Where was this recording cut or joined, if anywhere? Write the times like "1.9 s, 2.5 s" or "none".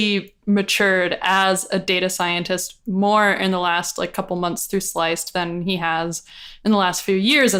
none